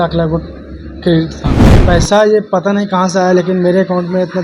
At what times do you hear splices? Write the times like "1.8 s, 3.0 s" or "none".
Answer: 1.6 s